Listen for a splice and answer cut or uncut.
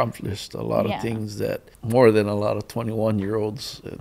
cut